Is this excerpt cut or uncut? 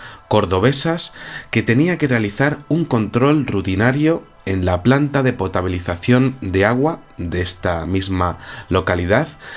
cut